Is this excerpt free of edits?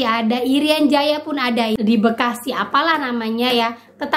no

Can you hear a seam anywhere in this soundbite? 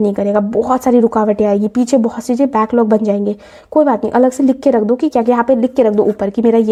no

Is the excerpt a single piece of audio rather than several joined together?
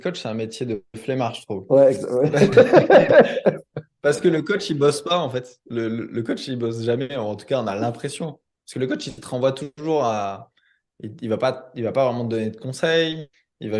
yes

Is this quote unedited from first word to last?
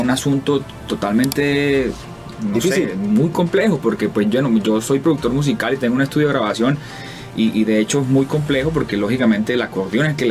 yes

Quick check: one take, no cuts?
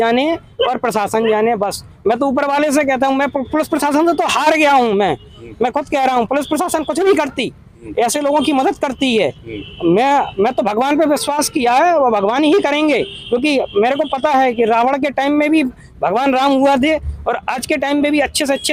yes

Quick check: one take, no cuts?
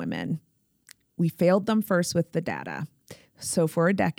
yes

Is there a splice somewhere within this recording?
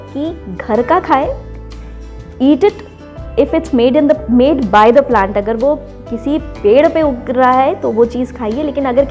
no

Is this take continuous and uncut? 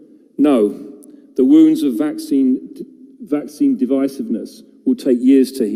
yes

